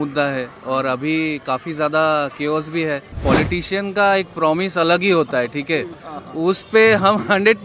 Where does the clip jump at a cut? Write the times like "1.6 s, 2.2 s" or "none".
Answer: 3.2 s